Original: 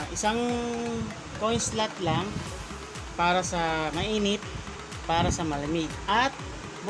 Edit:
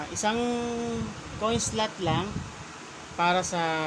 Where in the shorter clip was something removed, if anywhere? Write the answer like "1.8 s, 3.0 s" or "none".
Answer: none